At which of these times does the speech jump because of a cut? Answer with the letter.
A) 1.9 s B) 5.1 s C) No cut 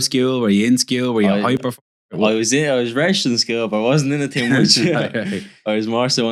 C